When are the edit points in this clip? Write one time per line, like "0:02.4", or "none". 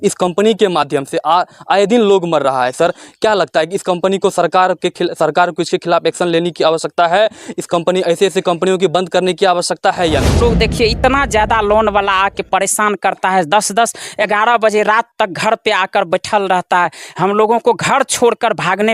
0:10.4